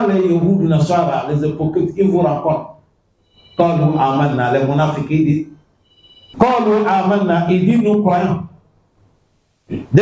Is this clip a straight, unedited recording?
no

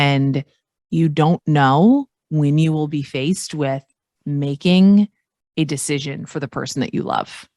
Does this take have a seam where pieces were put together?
no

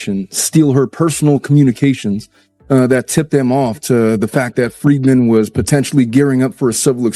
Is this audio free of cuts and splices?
yes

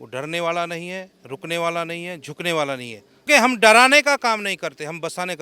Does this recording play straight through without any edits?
no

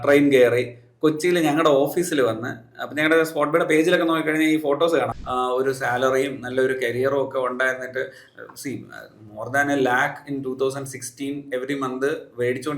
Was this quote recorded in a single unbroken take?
no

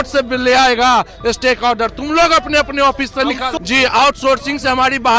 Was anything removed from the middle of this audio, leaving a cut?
yes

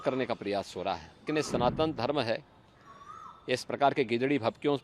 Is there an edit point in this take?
yes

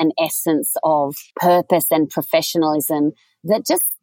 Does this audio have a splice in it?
yes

